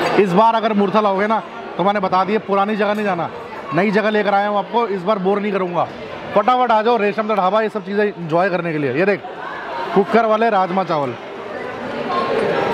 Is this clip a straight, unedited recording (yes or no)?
yes